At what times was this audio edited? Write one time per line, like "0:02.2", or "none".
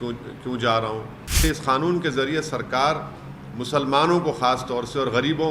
0:01.4